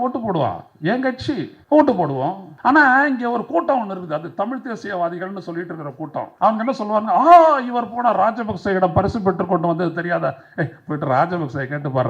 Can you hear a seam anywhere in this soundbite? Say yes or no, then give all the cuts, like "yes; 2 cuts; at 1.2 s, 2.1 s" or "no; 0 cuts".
yes; 3 cuts; at 1.6 s, 2.5 s, 6.3 s